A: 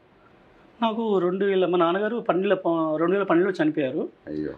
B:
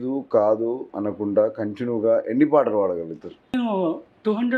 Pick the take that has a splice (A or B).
B